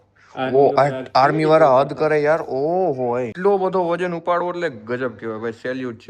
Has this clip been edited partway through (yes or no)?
yes